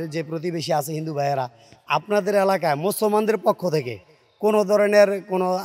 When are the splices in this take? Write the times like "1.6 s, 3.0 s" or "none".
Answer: none

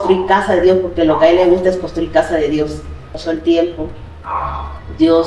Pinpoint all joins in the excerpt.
3.1 s

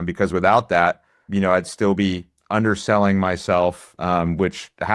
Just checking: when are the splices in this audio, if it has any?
1.2 s

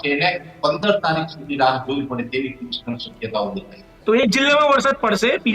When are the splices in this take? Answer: 3.9 s

